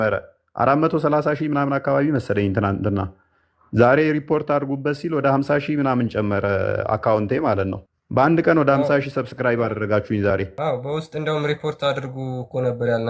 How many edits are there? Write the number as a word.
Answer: zero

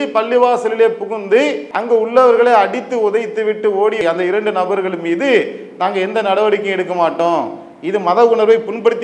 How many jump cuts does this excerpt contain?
one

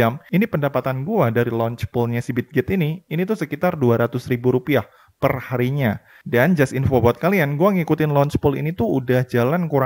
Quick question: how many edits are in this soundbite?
zero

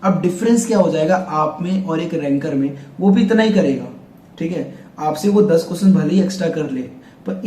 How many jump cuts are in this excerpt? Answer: zero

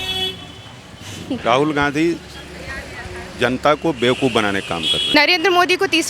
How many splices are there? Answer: two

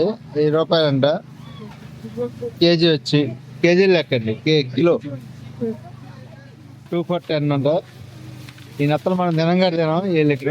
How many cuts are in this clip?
one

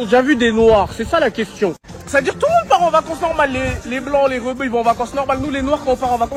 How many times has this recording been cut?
zero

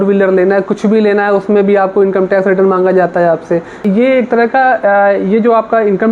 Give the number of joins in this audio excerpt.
one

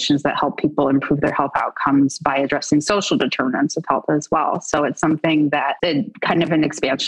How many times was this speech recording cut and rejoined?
one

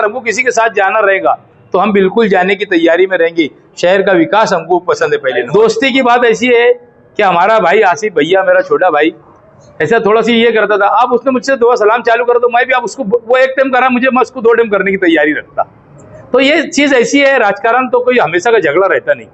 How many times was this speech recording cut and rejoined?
one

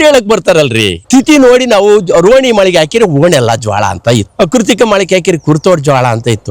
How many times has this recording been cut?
one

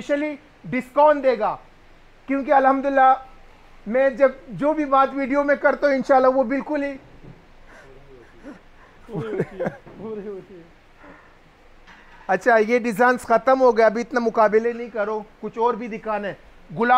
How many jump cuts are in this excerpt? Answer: zero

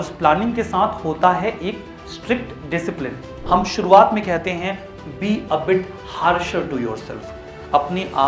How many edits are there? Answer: one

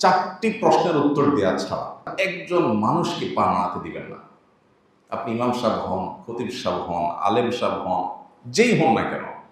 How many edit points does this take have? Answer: one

